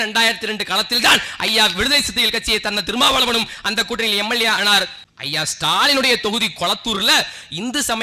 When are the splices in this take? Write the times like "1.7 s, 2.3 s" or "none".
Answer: 5.0 s